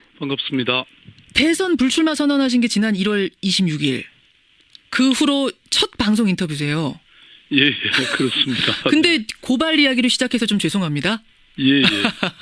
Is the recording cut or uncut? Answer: cut